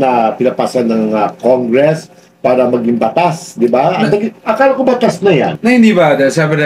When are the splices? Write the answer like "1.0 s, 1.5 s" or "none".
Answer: none